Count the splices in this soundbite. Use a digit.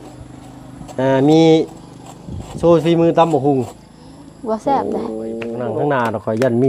1